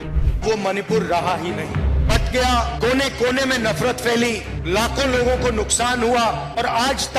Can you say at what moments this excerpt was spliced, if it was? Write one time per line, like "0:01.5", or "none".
none